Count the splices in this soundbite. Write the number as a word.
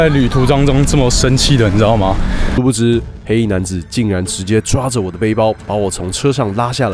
one